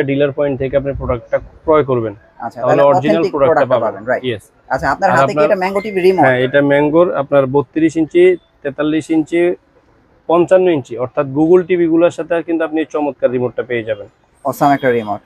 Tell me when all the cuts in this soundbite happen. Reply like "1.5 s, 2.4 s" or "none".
none